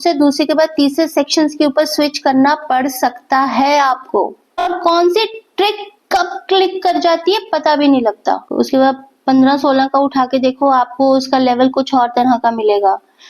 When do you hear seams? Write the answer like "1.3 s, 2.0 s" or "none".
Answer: 4.4 s, 8.5 s